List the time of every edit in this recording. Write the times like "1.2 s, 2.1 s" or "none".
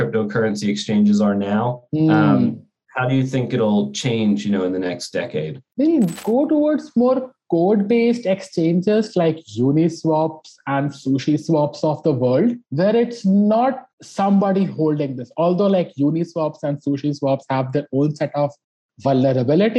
none